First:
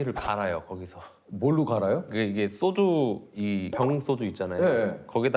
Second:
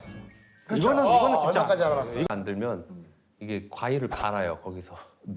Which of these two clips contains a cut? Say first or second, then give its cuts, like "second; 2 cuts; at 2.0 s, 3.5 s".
second; 1 cut; at 2.3 s